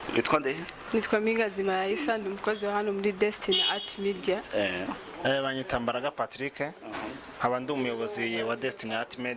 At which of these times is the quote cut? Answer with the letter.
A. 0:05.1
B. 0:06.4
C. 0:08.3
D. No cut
A